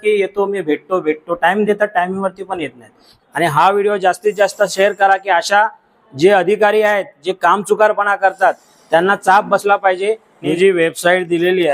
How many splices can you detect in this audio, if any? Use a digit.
2